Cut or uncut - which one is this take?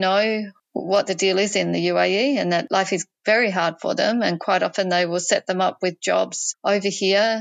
uncut